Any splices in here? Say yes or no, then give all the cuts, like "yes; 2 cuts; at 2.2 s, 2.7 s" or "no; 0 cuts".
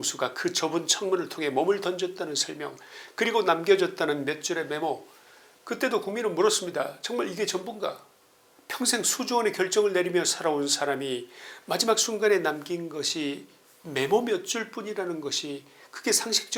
no; 0 cuts